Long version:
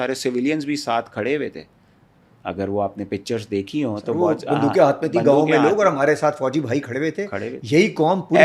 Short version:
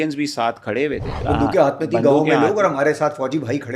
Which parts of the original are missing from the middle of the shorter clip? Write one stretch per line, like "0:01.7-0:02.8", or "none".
0:01.7-0:04.4